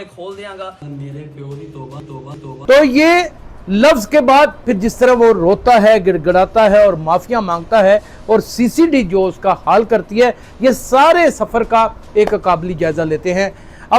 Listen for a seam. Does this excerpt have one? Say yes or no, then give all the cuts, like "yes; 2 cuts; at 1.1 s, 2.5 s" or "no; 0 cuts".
no; 0 cuts